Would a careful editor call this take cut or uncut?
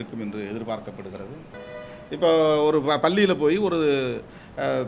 cut